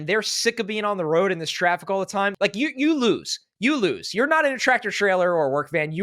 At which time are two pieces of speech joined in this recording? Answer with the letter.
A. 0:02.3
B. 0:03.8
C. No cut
A